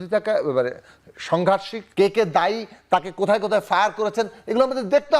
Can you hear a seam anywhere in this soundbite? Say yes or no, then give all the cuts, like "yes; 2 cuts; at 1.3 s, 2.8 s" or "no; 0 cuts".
yes; 1 cut; at 1.8 s